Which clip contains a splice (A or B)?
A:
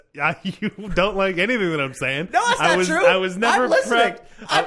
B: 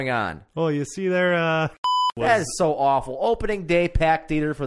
B